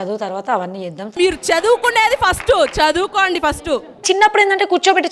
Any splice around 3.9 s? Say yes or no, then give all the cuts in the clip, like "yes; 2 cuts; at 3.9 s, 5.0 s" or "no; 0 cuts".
yes; 1 cut; at 3.9 s